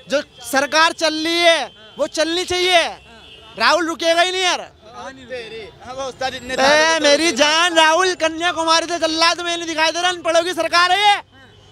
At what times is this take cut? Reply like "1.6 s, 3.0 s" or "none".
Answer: none